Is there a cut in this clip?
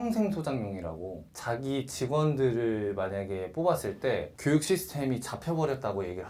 no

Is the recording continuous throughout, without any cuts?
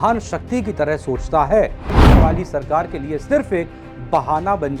no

